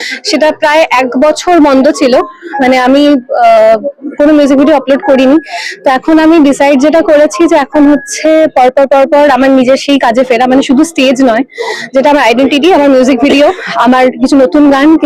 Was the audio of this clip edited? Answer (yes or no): no